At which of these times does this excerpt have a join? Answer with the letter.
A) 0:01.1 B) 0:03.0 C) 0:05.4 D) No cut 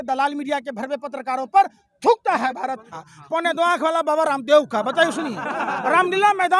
B